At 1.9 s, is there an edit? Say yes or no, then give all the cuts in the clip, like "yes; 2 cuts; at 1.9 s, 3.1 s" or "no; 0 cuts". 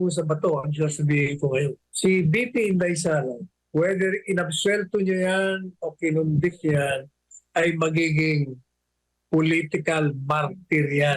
yes; 2 cuts; at 1.9 s, 3.5 s